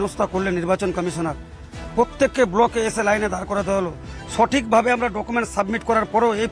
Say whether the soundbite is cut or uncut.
uncut